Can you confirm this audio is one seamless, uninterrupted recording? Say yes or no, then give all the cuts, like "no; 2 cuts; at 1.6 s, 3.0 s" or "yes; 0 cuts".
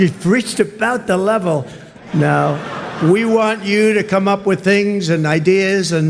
yes; 0 cuts